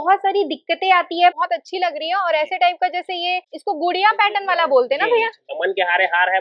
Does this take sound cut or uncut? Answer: cut